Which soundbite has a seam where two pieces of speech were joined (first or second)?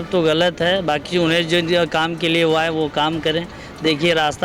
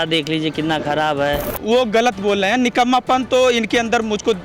second